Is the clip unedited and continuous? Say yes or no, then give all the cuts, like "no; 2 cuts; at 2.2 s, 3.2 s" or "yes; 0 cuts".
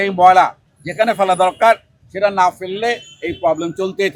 yes; 0 cuts